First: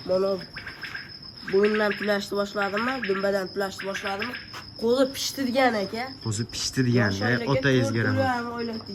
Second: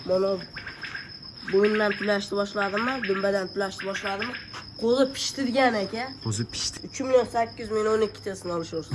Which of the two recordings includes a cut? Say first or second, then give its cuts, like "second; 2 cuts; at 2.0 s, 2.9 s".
second; 1 cut; at 6.7 s